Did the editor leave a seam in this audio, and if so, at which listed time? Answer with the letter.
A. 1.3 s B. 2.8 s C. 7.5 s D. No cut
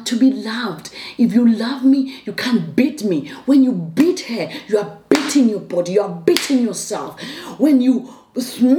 D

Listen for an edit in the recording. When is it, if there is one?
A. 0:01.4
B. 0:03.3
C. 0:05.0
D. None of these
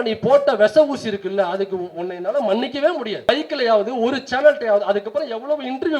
B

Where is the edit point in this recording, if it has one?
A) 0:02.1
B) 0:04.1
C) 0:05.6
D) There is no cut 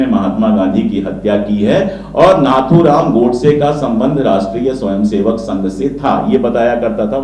D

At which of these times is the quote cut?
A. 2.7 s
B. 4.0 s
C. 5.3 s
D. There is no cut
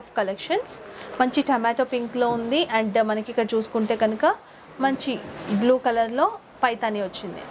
D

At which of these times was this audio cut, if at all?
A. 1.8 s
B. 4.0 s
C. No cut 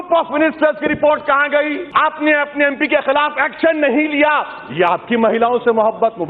A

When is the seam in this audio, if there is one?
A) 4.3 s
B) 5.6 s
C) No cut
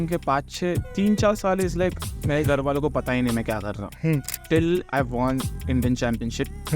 A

